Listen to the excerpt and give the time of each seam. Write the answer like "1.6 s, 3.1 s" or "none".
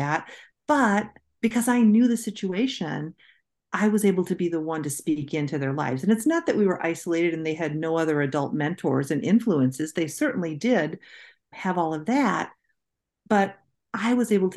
none

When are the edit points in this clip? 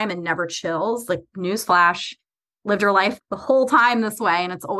3.2 s

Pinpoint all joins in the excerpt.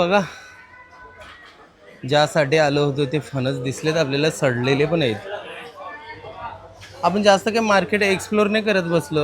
none

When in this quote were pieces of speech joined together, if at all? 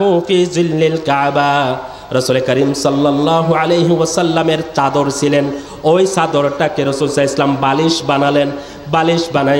none

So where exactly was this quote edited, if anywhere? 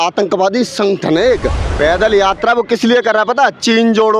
1.6 s

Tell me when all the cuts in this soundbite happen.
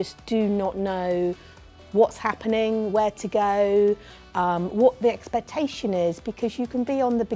none

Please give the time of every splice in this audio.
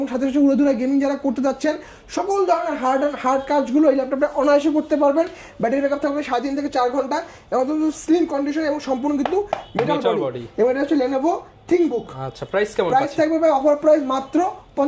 none

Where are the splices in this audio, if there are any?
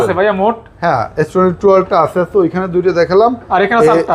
none

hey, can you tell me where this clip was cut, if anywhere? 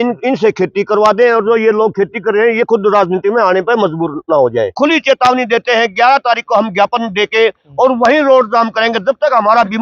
4.8 s

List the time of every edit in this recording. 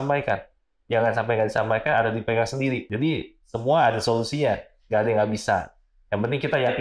2.9 s

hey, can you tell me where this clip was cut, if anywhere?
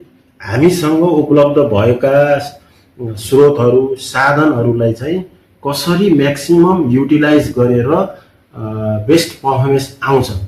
none

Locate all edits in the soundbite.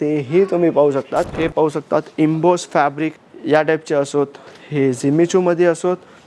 1.4 s

